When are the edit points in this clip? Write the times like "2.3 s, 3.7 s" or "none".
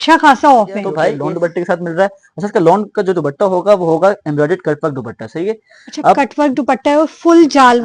1.0 s

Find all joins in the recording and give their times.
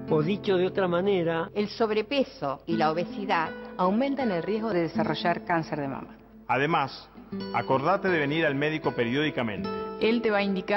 4.7 s

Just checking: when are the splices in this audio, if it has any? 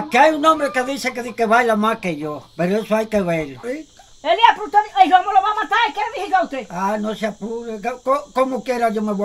3.7 s

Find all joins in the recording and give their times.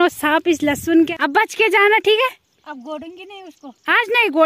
1.1 s

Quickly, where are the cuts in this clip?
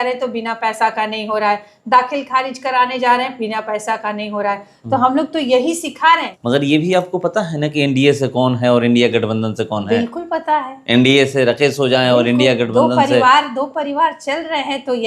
6.3 s

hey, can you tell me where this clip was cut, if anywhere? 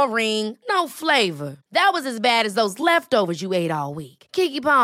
none

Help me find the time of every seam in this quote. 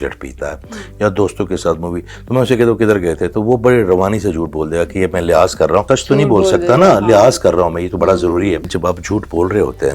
5.8 s, 8.7 s

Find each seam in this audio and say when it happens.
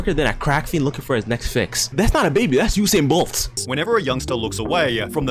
3.5 s

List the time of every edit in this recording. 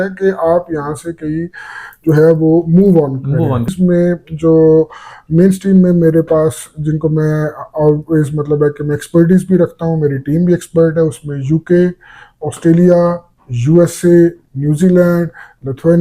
3.7 s

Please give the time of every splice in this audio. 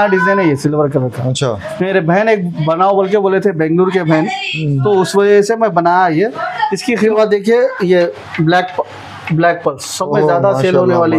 7.1 s

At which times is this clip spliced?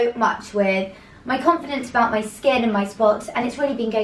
none

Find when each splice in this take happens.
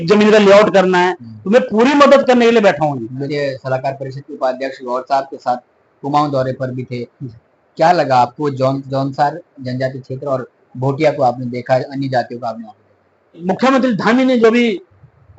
3.3 s, 8.8 s, 13.4 s

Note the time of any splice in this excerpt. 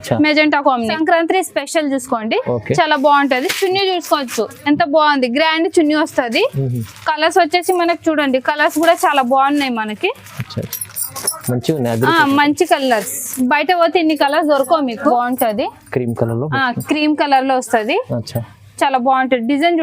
0.9 s, 15.1 s

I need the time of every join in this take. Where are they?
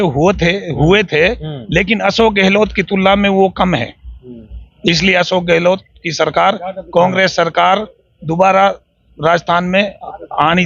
none

